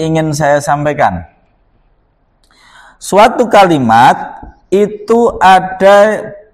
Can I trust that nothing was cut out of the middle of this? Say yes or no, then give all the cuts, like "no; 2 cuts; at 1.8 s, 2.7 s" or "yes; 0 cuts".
yes; 0 cuts